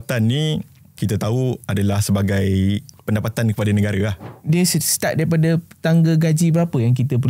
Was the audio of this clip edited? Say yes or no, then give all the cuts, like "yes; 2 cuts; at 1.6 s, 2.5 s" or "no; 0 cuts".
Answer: yes; 3 cuts; at 1.0 s, 2.9 s, 4.3 s